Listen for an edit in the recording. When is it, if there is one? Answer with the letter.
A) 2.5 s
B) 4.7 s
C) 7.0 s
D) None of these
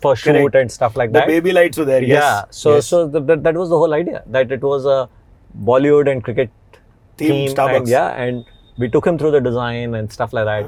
D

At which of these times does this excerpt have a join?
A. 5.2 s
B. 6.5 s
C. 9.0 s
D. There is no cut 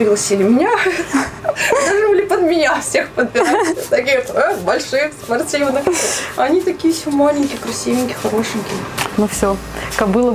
C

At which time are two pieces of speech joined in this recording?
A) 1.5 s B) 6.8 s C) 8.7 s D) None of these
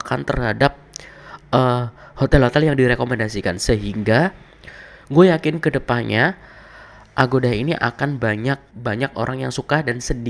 C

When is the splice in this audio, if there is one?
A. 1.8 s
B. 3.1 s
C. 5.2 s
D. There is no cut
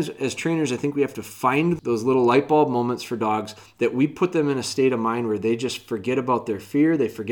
A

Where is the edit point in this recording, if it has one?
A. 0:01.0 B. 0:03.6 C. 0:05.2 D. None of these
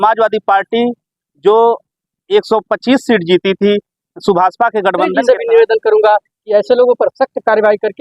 C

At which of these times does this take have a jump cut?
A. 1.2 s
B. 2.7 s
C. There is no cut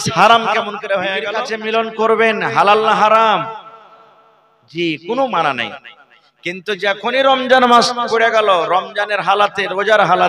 A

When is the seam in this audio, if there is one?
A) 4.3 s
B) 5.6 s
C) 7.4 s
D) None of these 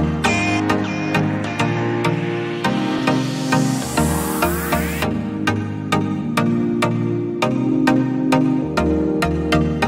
C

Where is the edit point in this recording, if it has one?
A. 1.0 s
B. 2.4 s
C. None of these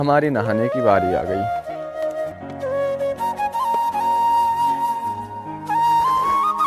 B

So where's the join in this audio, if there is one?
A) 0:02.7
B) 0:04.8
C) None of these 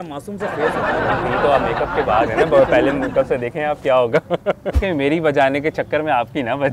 B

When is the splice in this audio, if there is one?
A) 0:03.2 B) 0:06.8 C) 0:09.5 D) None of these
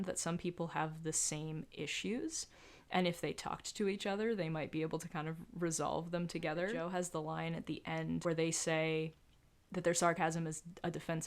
B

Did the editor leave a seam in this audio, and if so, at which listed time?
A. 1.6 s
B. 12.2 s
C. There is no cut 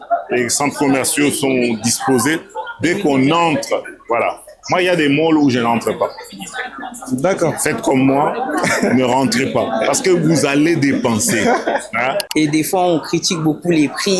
B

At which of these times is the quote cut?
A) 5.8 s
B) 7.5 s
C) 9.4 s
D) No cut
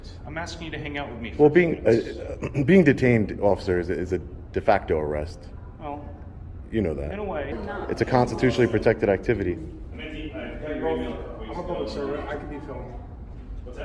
B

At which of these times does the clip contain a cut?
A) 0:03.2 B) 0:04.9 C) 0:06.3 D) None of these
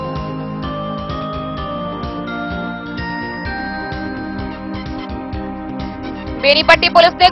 D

